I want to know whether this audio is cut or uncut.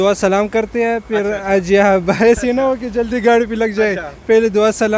uncut